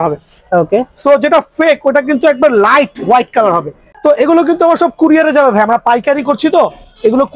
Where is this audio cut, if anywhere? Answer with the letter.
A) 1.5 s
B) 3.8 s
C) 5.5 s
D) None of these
B